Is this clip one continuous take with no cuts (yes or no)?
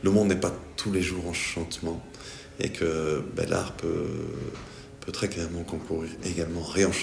yes